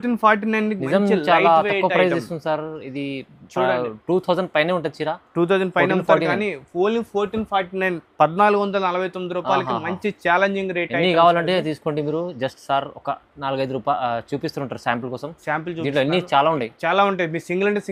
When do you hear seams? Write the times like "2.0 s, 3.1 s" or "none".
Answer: none